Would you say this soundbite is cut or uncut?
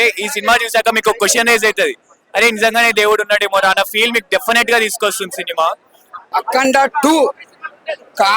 cut